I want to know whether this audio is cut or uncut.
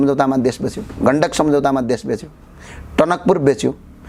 uncut